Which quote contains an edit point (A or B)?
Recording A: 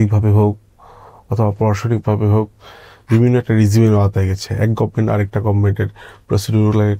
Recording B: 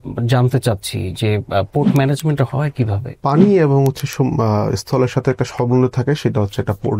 B